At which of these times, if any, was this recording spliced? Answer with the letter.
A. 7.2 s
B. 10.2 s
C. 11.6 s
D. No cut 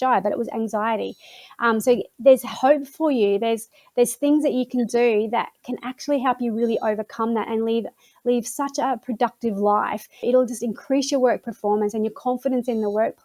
B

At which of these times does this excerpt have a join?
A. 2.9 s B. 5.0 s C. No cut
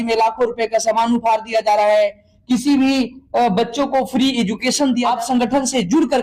B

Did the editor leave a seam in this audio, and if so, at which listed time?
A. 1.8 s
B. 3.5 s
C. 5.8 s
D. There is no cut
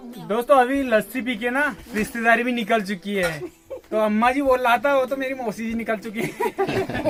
D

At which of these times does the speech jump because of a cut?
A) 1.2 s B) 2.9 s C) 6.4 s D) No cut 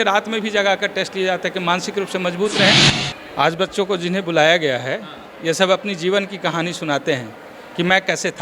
B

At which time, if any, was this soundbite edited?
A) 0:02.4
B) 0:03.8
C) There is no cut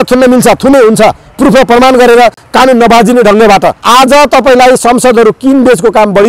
B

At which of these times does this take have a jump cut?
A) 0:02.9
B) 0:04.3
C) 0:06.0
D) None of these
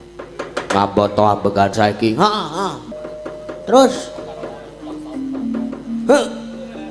A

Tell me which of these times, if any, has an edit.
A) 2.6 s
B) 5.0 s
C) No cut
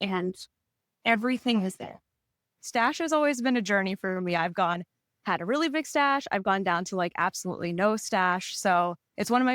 A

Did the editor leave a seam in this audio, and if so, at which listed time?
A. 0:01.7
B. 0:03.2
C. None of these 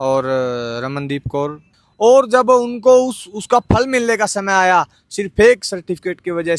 A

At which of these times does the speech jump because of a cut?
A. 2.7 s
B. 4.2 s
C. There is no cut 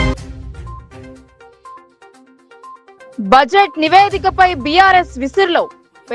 A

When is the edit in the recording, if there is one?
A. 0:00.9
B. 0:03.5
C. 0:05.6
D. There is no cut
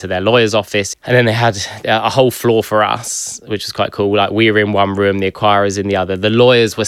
A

